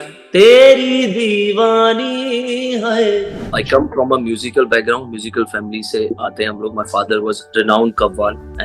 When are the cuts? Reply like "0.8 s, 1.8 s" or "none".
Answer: 3.6 s, 6.1 s, 7.4 s